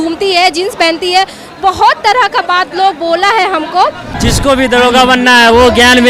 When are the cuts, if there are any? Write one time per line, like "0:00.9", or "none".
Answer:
0:04.1